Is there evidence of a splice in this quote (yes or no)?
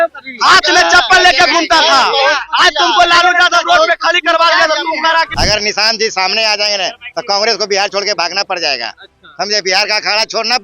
yes